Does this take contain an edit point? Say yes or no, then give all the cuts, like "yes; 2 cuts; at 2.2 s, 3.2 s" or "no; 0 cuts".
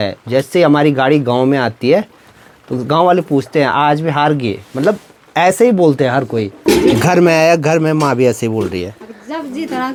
no; 0 cuts